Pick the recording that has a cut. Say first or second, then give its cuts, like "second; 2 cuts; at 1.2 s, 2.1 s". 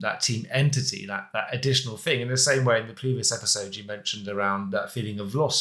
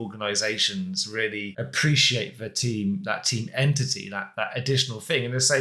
second; 1 cut; at 1.5 s